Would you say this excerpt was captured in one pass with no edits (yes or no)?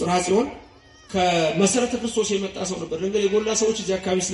yes